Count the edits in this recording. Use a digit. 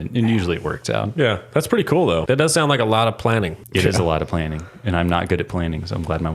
2